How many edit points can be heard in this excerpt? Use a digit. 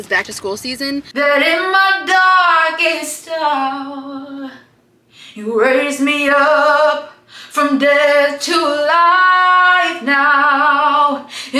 1